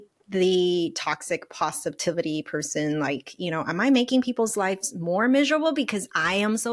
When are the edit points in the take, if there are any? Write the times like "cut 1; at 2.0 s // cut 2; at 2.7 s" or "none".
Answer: none